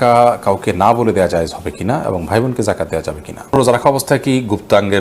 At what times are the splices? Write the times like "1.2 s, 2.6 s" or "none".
3.6 s